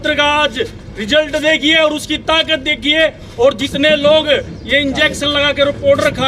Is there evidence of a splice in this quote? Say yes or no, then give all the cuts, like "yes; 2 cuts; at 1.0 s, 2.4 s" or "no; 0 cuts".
no; 0 cuts